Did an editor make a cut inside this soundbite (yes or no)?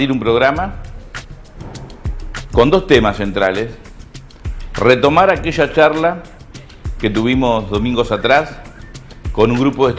yes